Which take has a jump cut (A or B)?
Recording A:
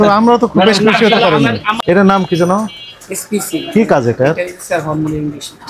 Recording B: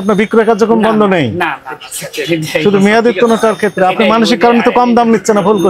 A